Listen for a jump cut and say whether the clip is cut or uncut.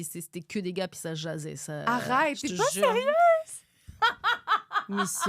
uncut